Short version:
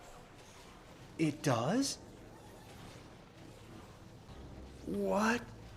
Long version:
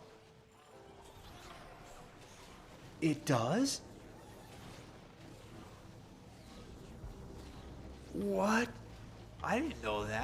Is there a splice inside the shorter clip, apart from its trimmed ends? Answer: yes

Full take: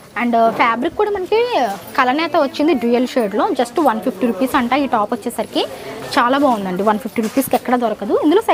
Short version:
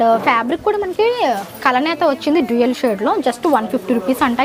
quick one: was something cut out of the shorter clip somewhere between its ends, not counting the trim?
no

